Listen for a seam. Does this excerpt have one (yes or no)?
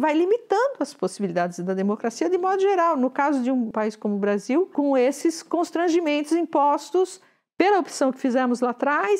yes